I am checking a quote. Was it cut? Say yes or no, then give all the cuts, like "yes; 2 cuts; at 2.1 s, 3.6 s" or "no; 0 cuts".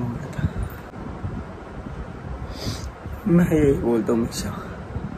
yes; 1 cut; at 0.9 s